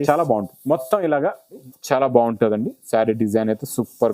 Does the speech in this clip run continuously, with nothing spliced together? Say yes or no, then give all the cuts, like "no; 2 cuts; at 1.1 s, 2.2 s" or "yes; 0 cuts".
no; 1 cut; at 1.6 s